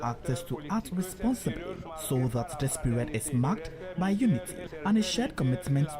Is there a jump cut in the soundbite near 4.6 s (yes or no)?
yes